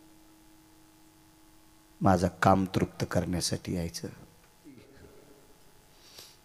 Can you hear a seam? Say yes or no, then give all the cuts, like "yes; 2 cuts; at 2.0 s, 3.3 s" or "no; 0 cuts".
yes; 1 cut; at 4.9 s